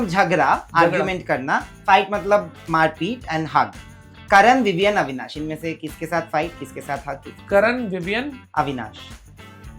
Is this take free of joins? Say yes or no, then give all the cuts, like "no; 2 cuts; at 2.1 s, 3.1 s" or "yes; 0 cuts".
yes; 0 cuts